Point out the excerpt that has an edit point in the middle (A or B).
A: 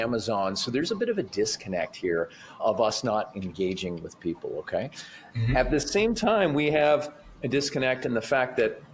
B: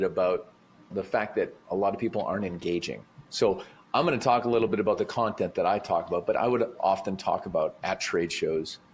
B